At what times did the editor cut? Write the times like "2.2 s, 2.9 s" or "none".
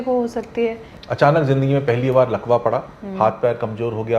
0.9 s